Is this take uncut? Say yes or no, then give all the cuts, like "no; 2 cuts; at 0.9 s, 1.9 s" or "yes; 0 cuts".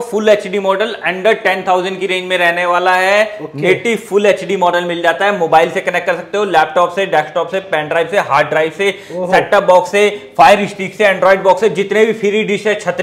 yes; 0 cuts